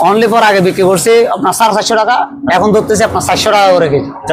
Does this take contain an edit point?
no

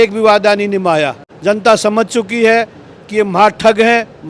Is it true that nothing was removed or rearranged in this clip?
no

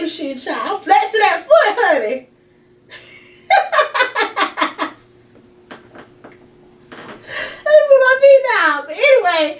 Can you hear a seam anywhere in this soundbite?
no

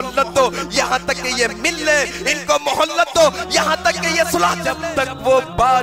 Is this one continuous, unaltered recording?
no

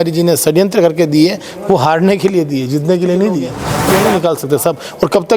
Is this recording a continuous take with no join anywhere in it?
no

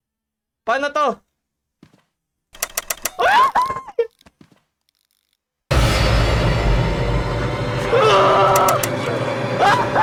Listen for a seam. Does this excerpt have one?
no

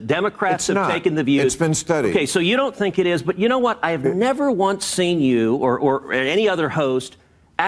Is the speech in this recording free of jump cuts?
yes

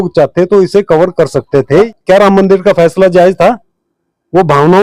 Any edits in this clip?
yes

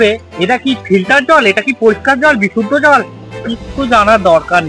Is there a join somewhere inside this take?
no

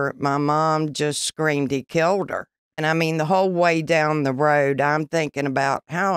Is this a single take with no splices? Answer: no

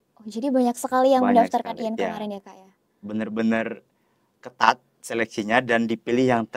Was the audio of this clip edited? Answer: no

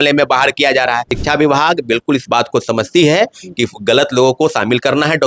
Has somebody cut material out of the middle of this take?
yes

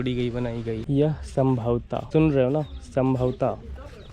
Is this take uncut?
no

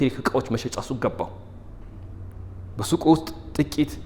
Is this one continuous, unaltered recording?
yes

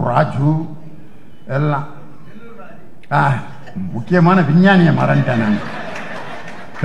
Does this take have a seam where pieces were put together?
no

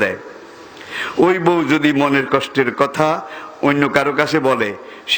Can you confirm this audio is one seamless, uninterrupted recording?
yes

